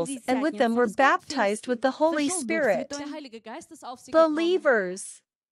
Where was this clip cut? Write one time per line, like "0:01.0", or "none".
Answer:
0:04.5